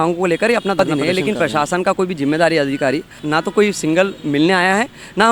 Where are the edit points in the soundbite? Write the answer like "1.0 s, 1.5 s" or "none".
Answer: 0.8 s, 3.1 s